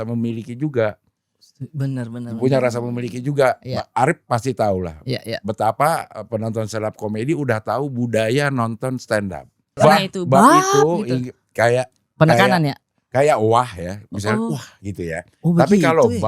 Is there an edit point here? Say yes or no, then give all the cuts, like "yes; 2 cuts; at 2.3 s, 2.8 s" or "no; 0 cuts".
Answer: yes; 1 cut; at 9.8 s